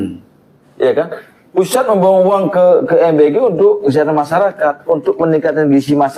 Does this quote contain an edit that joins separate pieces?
no; 0 cuts

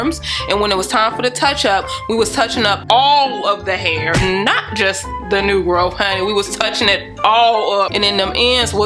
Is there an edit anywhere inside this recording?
yes; 1 cut; at 7.9 s

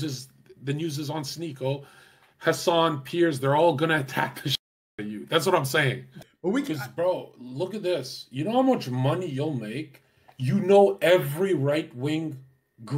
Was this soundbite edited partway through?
yes; 1 cut; at 6.1 s

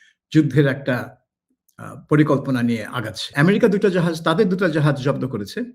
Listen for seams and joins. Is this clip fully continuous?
no; 1 cut; at 3.3 s

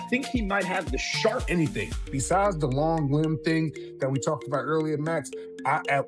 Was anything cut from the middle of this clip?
yes; 1 cut; at 1.5 s

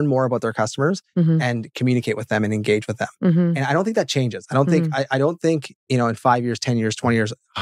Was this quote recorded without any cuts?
yes; 0 cuts

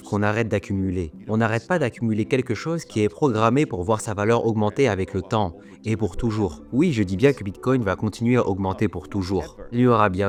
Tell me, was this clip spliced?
no; 0 cuts

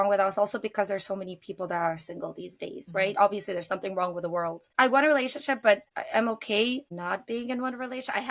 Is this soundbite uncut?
no; 3 cuts; at 4.6 s, 5.9 s, 6.9 s

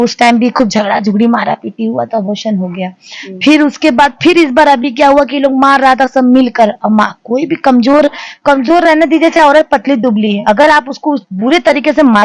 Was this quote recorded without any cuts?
yes; 0 cuts

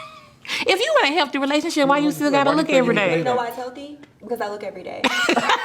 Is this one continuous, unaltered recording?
yes; 0 cuts

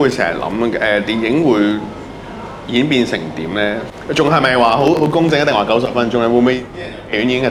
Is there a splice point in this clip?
no; 0 cuts

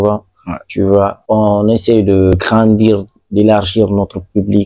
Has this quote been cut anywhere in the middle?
yes; 2 cuts; at 1.2 s, 2.3 s

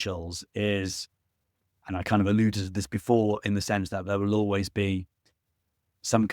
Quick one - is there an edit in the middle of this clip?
no; 0 cuts

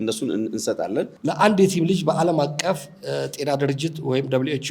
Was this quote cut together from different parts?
yes; 1 cut; at 1.1 s

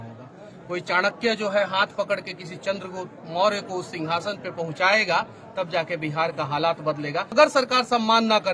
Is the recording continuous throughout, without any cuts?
no; 1 cut; at 7.3 s

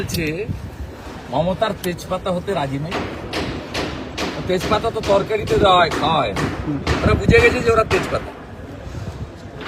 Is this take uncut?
yes; 0 cuts

